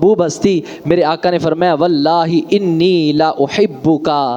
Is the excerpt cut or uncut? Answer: uncut